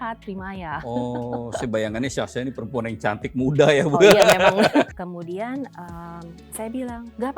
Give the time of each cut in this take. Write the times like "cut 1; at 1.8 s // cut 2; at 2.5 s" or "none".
cut 1; at 4.9 s